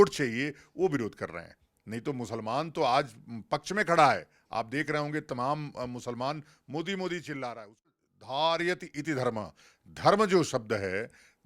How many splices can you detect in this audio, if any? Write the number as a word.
one